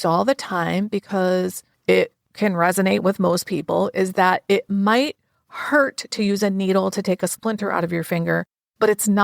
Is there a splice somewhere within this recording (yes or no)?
yes